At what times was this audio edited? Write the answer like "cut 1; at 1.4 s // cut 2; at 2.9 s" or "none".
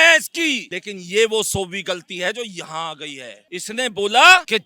cut 1; at 3.5 s